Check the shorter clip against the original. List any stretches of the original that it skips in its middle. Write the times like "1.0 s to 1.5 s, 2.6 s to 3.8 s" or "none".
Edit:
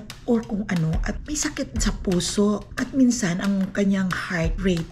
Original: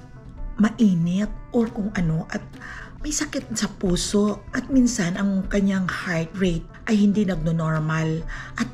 2.5 s to 3.0 s